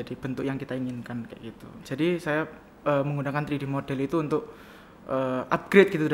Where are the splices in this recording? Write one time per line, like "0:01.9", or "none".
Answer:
0:01.6